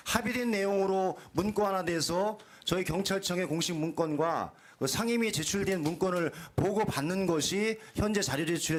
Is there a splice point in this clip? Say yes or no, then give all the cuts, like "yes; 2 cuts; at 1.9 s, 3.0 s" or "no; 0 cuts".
no; 0 cuts